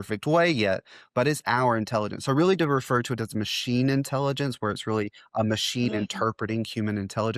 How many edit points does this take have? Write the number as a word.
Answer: zero